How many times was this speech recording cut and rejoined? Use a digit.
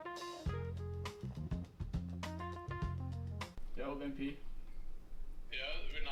0